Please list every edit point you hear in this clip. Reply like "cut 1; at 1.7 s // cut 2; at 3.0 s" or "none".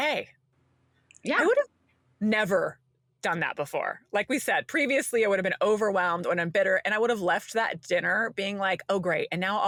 none